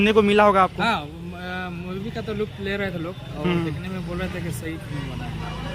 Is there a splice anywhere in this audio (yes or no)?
no